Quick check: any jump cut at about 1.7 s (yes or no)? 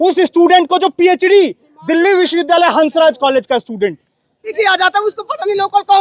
no